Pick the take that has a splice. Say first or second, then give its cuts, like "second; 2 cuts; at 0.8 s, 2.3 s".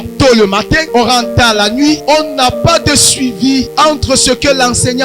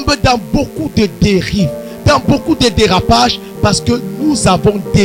first; 3 cuts; at 0.8 s, 2.0 s, 3.7 s